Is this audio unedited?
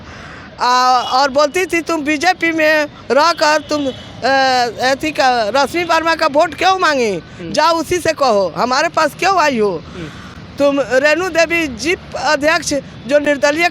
yes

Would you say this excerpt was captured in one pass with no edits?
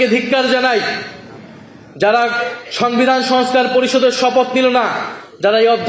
yes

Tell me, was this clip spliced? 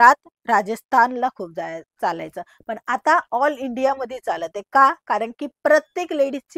no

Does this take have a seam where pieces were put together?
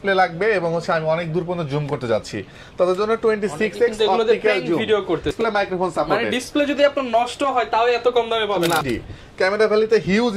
yes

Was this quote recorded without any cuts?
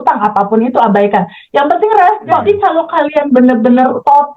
no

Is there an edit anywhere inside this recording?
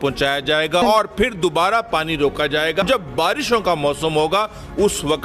yes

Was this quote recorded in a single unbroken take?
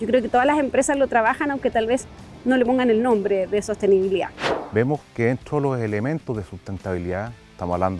no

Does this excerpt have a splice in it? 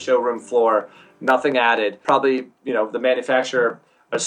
yes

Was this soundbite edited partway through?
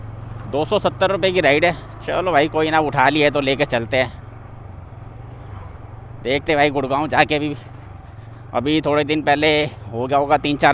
no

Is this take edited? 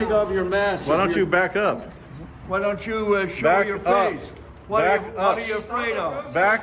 no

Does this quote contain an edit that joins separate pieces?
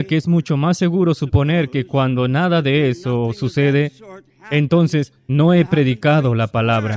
no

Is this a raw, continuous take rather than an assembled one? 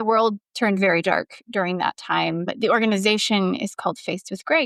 yes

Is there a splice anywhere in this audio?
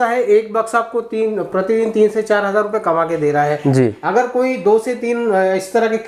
no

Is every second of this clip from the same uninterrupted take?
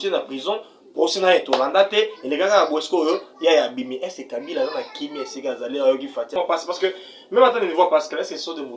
no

